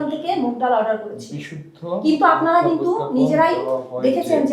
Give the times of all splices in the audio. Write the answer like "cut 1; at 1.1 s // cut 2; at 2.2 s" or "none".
none